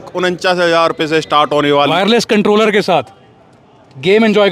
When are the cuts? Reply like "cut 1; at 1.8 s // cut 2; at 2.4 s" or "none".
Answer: cut 1; at 1.8 s

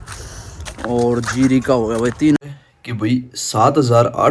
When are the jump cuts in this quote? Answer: cut 1; at 2.4 s

